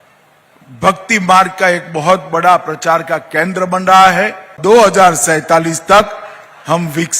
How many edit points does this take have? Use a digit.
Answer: 1